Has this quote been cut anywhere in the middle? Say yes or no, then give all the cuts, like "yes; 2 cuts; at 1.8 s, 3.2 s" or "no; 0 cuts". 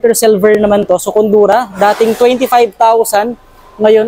no; 0 cuts